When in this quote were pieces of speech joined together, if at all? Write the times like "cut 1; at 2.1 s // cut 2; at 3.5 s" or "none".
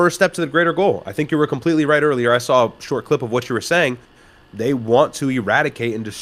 none